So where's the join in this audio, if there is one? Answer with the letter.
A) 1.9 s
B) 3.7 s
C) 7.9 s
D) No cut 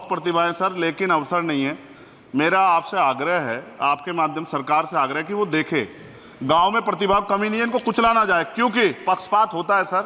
D